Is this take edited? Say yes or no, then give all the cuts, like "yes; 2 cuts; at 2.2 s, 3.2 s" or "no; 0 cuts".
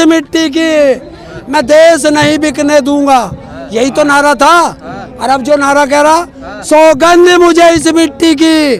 no; 0 cuts